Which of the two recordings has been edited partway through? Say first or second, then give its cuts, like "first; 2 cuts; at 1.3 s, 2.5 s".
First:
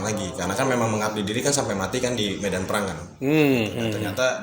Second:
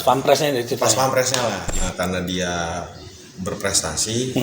second; 1 cut; at 1.7 s